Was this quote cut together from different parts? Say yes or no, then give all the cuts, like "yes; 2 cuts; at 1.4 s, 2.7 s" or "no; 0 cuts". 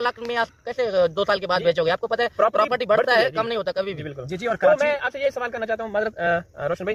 no; 0 cuts